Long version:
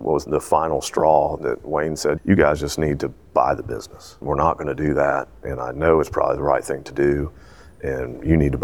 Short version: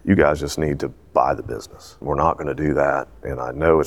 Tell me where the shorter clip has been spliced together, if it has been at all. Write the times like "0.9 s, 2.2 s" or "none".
none